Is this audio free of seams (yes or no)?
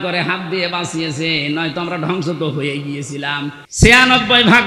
no